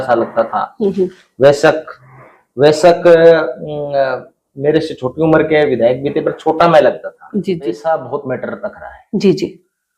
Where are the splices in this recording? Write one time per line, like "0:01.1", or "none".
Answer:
0:07.8